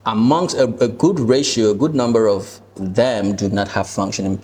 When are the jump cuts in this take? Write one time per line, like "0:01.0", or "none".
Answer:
none